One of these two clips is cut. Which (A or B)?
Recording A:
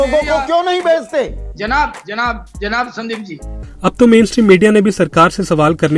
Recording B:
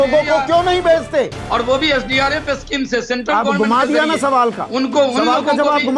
B